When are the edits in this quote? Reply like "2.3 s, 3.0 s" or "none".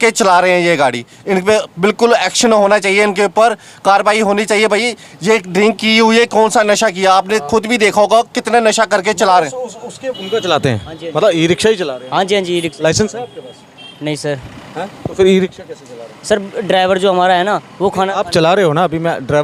10.2 s